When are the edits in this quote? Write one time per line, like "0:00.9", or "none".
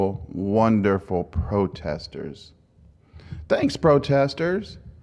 0:01.7